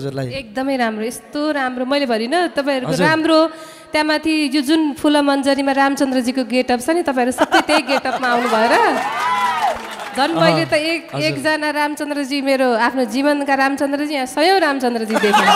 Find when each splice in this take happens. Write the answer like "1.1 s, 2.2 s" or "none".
none